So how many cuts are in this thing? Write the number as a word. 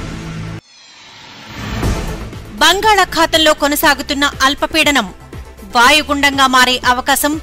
one